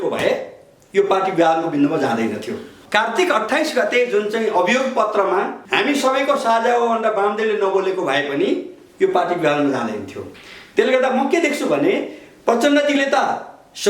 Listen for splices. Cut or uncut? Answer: cut